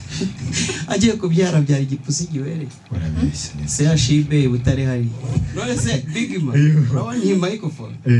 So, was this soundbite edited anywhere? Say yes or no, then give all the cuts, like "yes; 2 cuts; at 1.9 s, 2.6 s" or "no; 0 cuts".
yes; 1 cut; at 5.5 s